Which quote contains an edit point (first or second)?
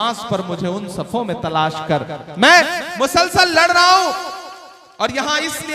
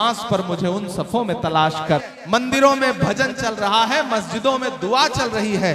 second